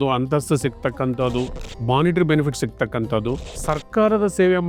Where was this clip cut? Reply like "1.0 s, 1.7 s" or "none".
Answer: 1.7 s, 3.5 s